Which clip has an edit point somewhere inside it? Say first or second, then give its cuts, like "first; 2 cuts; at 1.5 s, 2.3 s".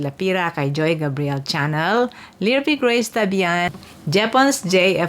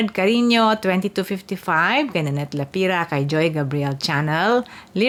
first; 1 cut; at 3.7 s